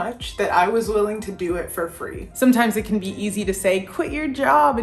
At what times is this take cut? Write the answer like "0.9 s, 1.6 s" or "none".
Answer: 2.2 s